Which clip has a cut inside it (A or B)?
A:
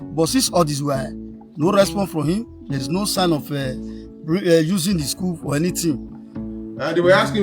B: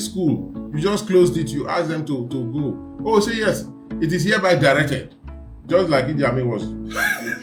A